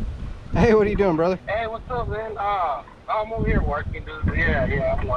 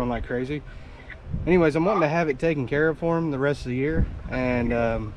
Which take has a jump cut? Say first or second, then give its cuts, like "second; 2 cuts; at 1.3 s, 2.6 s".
first; 1 cut; at 1.4 s